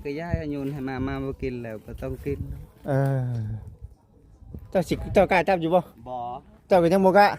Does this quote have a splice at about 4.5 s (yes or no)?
yes